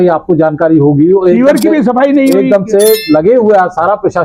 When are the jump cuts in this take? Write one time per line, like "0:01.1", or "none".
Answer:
none